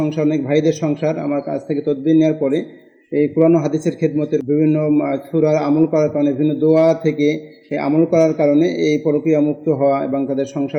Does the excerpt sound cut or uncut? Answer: uncut